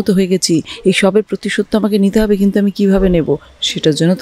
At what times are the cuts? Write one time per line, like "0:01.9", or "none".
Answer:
none